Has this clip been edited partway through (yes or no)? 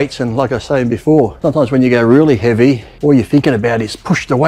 yes